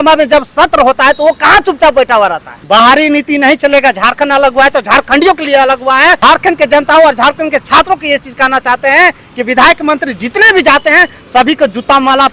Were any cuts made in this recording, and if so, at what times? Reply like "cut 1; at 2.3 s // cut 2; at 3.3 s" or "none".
cut 1; at 2.5 s // cut 2; at 6.2 s